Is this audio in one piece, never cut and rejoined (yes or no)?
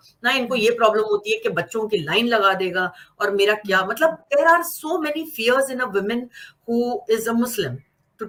yes